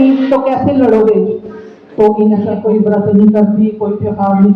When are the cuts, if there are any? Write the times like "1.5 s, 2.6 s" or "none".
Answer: 2.6 s